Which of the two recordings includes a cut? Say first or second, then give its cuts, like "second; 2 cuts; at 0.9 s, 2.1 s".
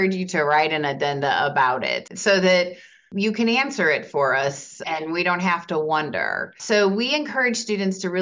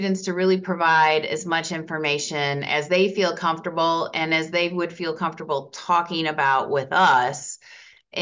first; 2 cuts; at 2.1 s, 3.1 s